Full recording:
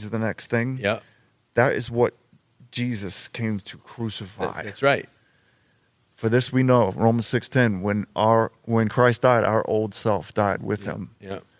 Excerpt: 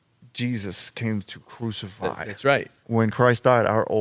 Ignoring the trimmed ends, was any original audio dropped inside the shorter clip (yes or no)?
yes